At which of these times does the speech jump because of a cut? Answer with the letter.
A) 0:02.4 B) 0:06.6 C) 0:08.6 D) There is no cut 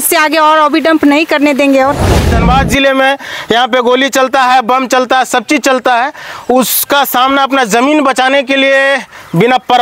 A